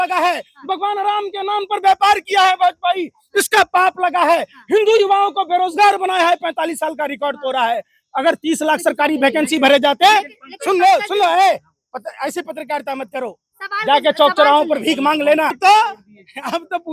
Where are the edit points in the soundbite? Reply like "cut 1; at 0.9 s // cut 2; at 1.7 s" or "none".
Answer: cut 1; at 15.5 s